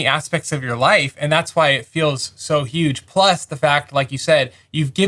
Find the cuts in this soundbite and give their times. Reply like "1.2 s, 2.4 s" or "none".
none